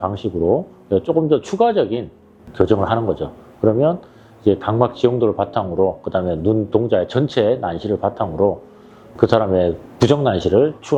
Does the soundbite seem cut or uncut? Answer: uncut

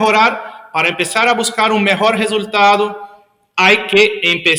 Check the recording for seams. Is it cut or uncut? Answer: uncut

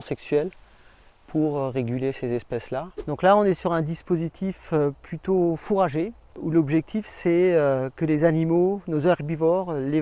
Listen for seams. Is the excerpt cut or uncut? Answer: cut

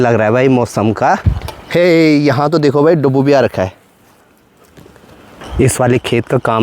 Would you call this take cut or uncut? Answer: uncut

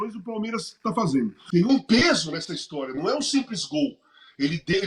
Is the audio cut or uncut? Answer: cut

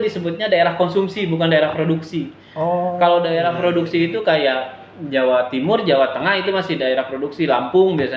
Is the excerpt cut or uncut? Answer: uncut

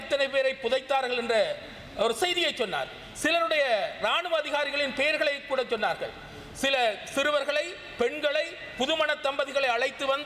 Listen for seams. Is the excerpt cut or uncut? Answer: uncut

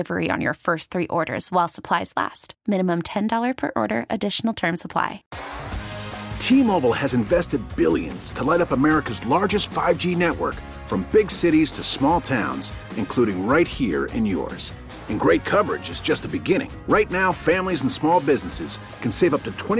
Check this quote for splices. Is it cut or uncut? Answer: cut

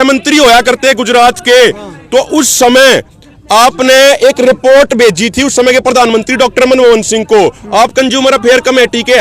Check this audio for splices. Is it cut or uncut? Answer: uncut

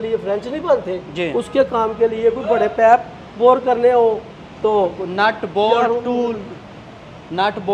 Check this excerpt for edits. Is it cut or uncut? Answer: uncut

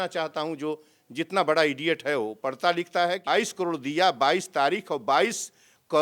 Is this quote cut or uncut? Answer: cut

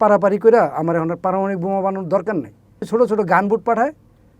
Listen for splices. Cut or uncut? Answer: cut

